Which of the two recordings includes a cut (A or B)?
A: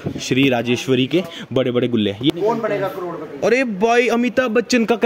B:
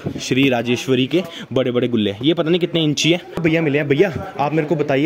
A